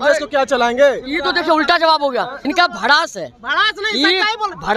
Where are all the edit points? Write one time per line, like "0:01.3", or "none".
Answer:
0:02.5